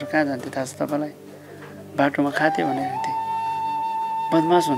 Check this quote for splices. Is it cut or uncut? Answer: uncut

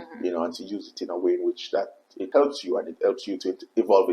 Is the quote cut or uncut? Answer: cut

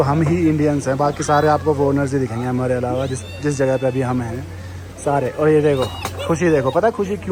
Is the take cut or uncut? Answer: uncut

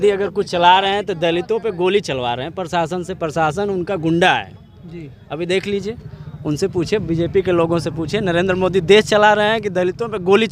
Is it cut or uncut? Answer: uncut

